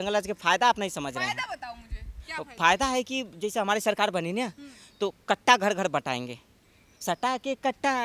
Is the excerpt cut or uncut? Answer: uncut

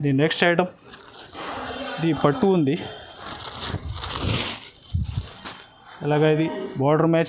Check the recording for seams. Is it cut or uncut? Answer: uncut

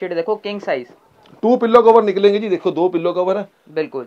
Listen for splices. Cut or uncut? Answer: uncut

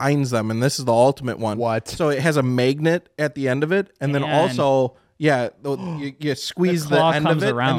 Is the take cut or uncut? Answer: uncut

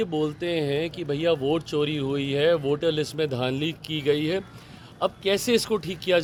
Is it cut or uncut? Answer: uncut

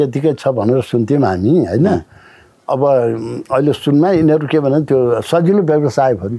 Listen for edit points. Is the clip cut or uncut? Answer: uncut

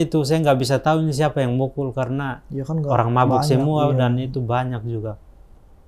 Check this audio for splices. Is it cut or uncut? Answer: uncut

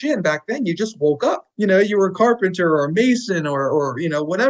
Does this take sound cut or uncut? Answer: cut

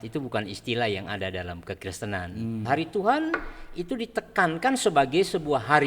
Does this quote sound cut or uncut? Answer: cut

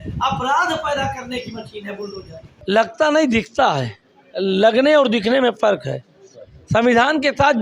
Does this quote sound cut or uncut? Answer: cut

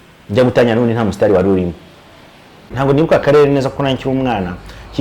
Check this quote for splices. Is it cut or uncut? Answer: cut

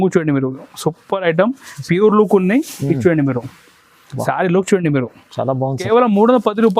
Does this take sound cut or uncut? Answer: cut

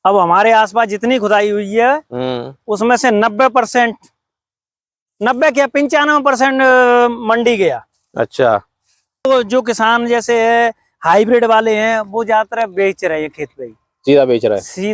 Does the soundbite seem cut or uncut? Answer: cut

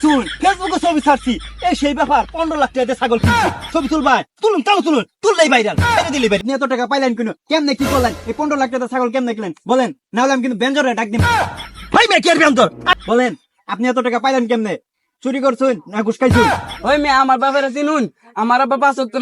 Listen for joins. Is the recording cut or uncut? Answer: cut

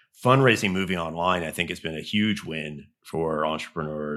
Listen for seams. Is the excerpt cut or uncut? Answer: uncut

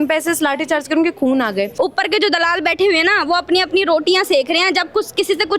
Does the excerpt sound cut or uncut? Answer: cut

